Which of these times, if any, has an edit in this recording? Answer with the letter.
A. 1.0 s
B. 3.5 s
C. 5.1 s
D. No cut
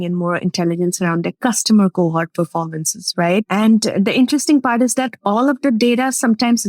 B